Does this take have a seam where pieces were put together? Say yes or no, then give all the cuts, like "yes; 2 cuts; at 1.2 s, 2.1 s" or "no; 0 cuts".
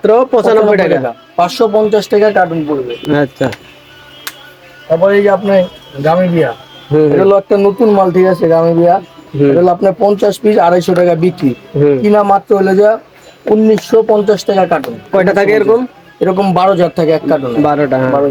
no; 0 cuts